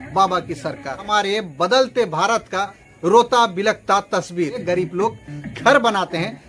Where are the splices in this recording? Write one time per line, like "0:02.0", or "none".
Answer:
0:01.0
0:04.6